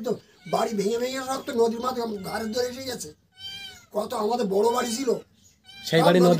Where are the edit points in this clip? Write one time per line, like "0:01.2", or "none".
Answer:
none